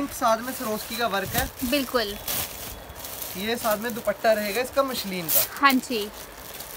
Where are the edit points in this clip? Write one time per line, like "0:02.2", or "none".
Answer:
none

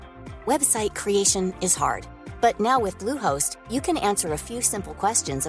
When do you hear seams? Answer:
none

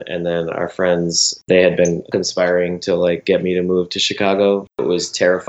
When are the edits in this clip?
0:01.4
0:02.1
0:04.8

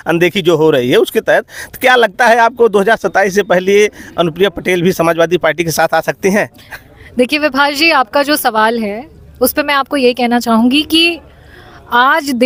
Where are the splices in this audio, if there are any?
none

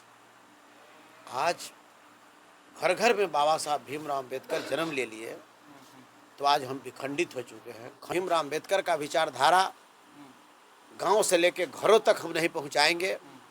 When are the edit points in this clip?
0:08.1

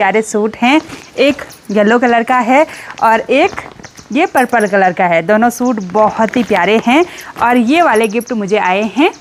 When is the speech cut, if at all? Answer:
none

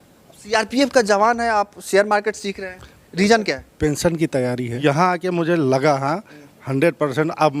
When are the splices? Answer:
0:04.8

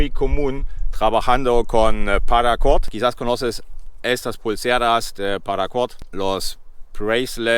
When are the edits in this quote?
0:02.8
0:06.0

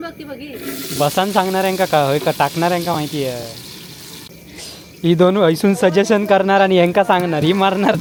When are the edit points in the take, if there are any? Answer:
none

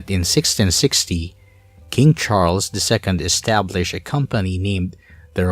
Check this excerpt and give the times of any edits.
0:02.7

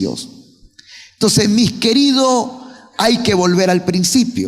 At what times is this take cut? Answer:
0:01.9

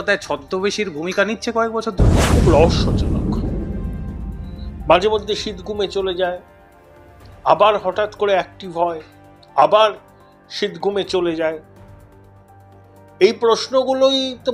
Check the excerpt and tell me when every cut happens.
0:02.3

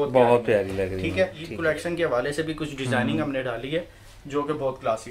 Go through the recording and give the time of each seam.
0:01.5

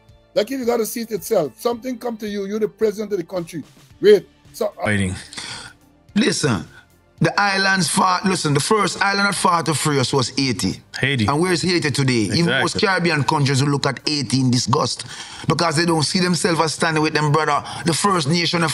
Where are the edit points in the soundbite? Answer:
0:04.9

